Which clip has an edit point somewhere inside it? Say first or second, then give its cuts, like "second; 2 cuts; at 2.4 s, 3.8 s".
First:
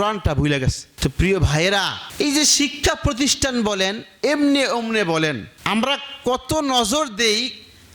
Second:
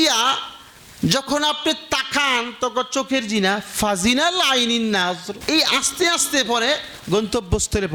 first; 1 cut; at 5.5 s